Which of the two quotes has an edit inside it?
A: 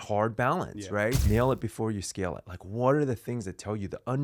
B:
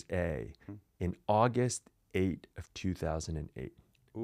A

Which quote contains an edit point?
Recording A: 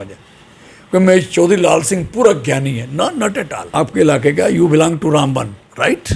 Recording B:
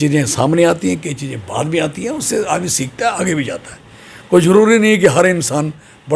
A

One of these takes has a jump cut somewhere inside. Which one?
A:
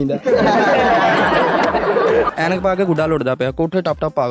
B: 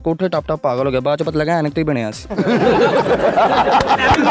A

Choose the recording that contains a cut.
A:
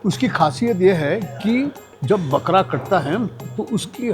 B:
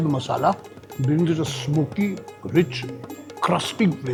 A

